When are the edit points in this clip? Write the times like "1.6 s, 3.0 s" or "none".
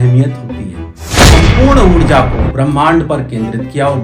1.2 s